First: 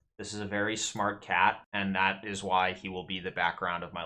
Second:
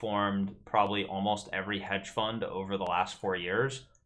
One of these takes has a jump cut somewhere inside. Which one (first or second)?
first